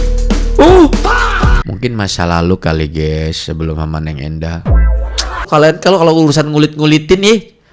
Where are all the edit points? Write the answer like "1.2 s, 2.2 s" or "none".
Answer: 1.6 s, 5.5 s